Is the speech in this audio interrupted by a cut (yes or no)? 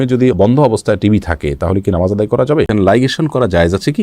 yes